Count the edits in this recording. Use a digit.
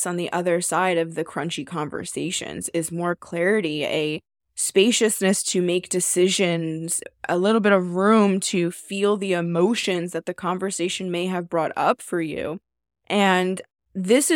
2